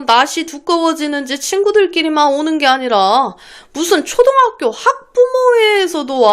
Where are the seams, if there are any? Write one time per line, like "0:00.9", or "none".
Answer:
none